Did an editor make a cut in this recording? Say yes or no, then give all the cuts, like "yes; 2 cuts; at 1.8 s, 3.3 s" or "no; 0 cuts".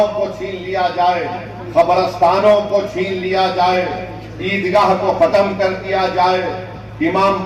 no; 0 cuts